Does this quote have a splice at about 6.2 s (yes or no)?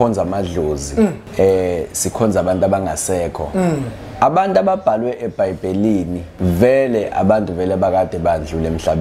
yes